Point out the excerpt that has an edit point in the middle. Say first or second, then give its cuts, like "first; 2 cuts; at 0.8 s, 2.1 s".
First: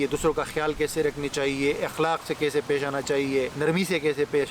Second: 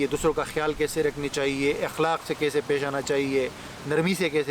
first; 1 cut; at 3.5 s